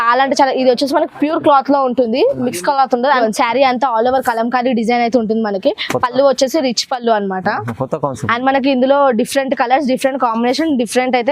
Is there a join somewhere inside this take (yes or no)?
yes